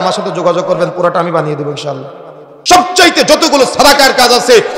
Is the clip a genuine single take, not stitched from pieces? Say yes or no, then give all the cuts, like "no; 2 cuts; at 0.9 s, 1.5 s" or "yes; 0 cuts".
no; 1 cut; at 2.6 s